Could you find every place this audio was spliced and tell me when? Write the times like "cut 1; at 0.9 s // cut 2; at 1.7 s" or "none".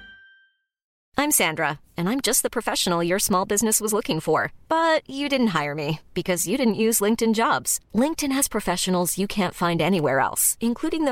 cut 1; at 1.0 s